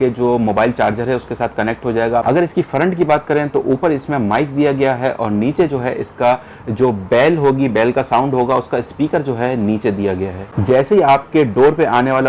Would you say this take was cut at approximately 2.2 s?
yes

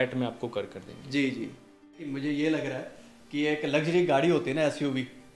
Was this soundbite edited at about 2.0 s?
yes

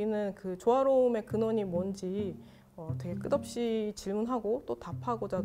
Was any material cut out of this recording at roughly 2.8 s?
no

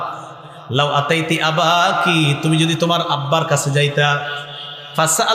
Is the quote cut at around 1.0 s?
no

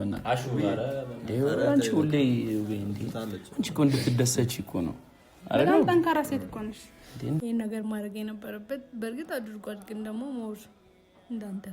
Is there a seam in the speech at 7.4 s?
yes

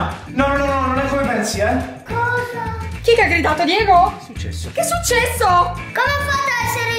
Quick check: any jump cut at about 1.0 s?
no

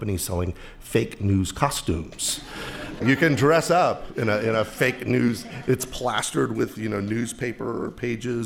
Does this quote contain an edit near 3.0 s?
yes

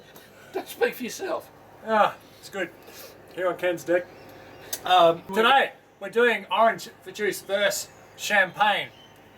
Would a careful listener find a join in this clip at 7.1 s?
no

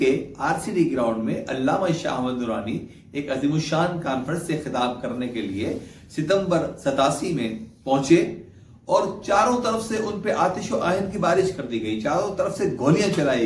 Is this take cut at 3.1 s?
no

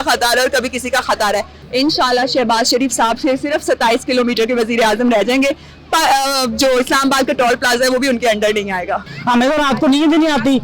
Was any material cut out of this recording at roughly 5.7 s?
no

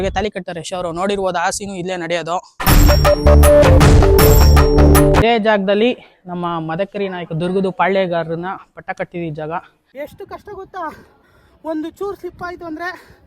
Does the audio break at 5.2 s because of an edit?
yes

